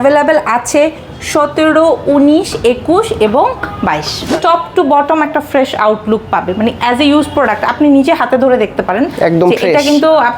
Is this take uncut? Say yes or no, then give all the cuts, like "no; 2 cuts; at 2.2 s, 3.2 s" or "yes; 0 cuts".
no; 1 cut; at 4.3 s